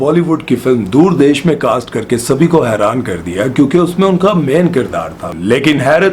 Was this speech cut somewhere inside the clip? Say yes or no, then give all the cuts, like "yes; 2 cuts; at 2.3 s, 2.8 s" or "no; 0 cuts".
yes; 1 cut; at 5.2 s